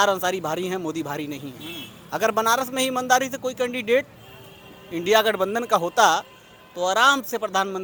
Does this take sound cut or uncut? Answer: uncut